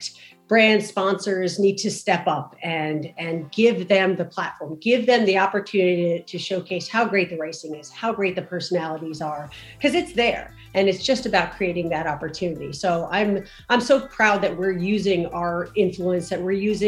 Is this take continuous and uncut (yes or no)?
yes